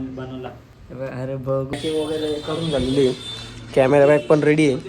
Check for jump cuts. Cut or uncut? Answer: cut